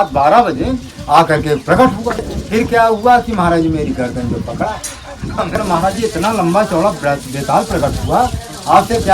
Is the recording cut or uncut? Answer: cut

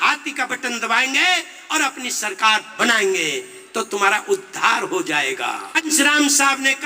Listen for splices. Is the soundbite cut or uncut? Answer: cut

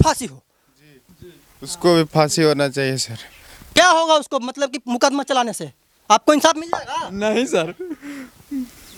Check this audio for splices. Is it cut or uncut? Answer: uncut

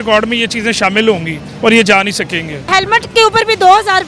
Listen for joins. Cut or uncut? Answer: cut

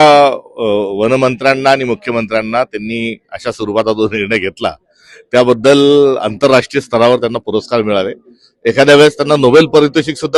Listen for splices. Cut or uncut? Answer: uncut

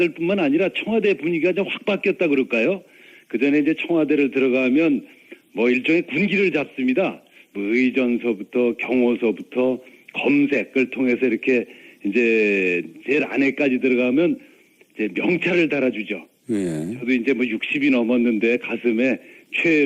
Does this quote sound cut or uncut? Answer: cut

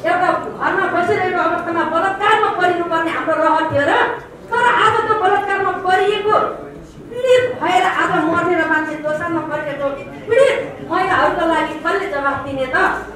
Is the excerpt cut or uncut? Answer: uncut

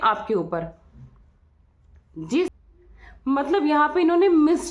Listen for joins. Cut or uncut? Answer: cut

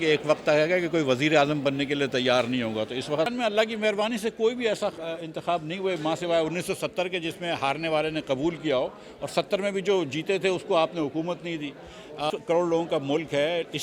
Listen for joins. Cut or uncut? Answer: cut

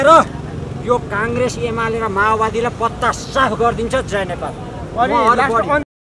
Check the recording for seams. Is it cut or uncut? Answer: uncut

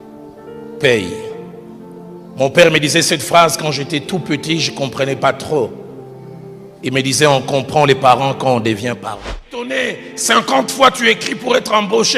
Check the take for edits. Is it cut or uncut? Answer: cut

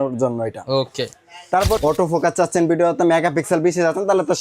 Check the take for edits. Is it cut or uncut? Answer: cut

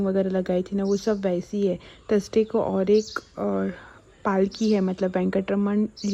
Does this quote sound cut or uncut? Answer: uncut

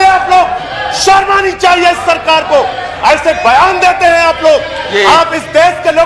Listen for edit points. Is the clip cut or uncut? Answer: uncut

